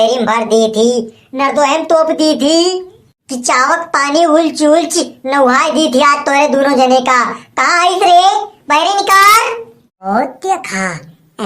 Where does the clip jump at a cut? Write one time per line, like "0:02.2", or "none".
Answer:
0:10.1

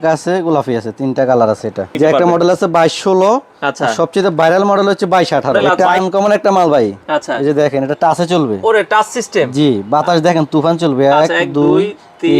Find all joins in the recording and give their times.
0:01.9
0:05.6

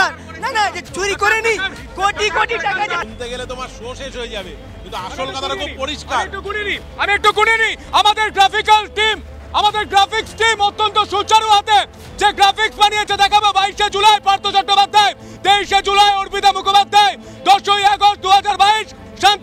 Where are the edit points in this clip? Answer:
0:03.0

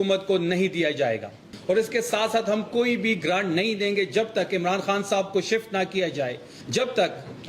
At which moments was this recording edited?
0:01.5
0:06.5

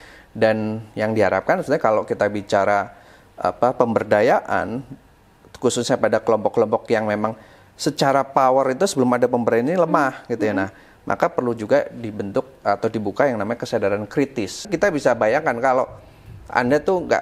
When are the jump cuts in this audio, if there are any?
0:14.7

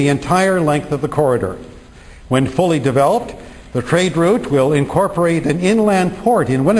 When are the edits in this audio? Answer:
0:02.0

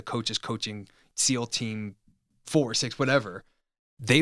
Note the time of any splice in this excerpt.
0:01.1
0:02.3

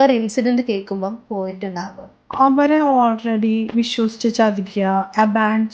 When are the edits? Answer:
0:02.3

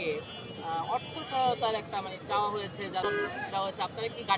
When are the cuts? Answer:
0:03.0

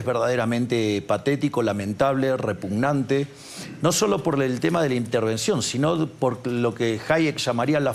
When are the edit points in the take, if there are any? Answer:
none

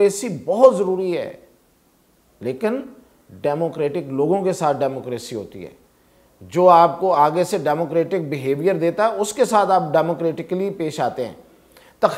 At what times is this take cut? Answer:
none

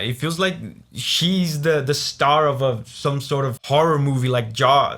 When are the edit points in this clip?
none

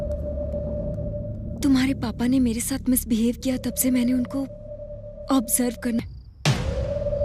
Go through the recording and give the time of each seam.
0:06.0

